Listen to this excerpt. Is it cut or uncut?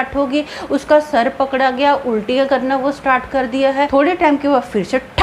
cut